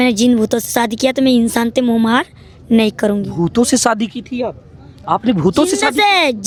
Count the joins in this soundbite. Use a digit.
0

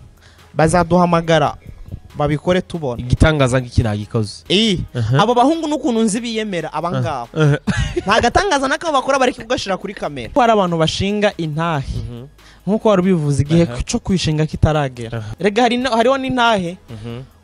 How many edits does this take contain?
2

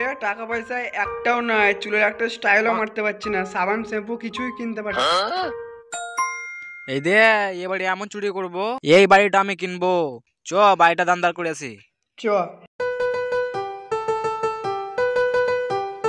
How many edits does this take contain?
0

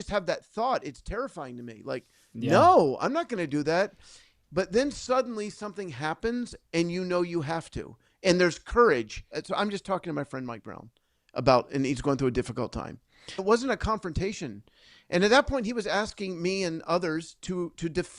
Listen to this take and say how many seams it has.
2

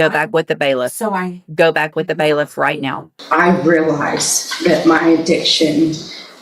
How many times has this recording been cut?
1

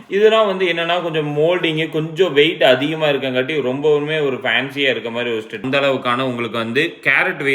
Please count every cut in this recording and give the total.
1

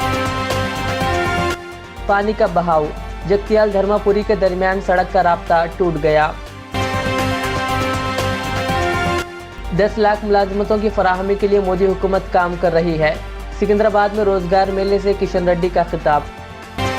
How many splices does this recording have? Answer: 0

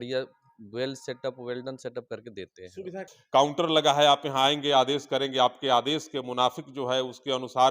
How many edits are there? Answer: 1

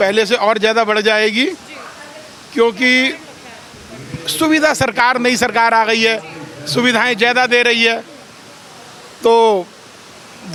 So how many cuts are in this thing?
0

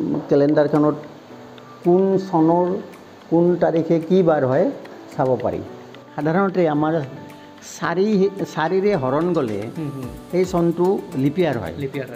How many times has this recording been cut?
1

